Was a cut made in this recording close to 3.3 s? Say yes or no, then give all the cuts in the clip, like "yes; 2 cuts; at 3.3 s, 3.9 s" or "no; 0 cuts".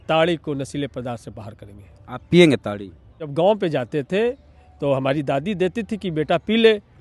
yes; 1 cut; at 3.3 s